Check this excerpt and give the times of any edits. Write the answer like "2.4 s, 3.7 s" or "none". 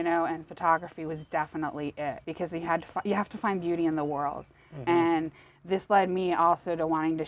2.2 s

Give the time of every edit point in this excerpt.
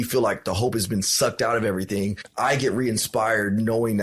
2.2 s

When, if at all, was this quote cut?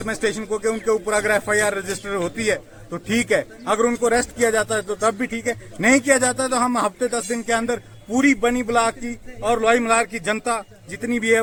none

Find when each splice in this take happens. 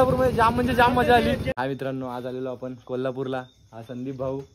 1.6 s

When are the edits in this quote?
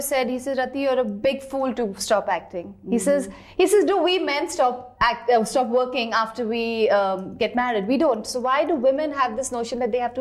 none

